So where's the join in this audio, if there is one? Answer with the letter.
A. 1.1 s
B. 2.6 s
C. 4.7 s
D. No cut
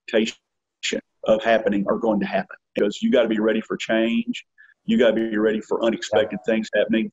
B